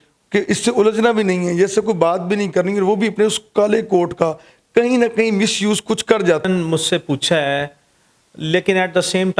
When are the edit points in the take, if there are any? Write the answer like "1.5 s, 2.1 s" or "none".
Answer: 6.5 s